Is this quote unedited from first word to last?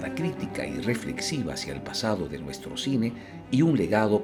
yes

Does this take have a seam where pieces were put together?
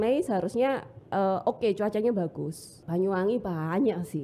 yes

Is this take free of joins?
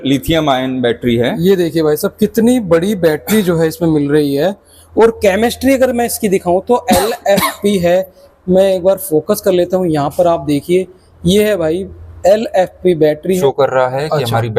no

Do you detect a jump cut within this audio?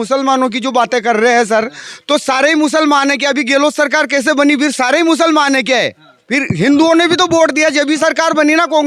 no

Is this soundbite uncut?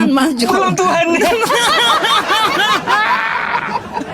yes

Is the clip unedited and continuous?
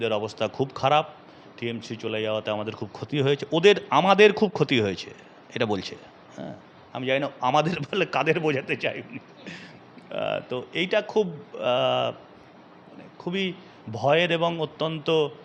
yes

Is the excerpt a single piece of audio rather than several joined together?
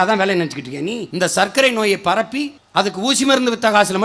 no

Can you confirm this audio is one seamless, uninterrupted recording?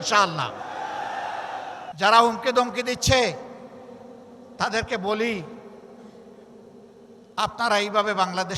no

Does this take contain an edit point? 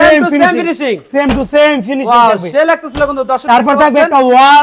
no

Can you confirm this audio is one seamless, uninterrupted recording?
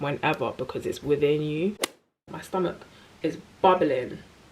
no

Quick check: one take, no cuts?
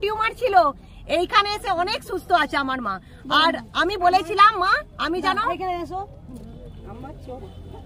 yes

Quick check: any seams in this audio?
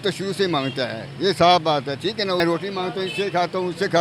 yes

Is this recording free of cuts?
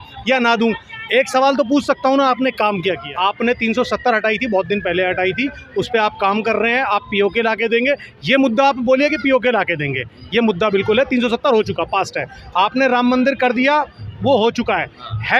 no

